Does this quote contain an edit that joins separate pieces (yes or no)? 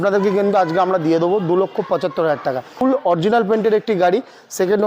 yes